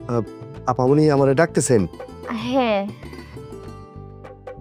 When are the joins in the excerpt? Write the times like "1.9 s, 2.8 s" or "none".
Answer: 3.0 s